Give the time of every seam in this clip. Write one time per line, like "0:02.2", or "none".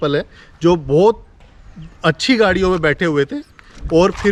none